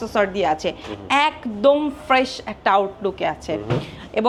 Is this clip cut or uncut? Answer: uncut